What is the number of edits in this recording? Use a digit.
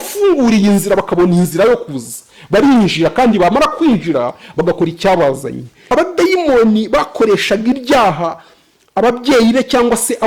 1